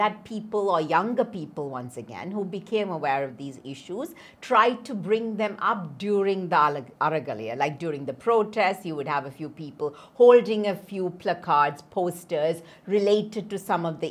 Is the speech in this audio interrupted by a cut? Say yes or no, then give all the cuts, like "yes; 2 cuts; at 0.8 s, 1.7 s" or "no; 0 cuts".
no; 0 cuts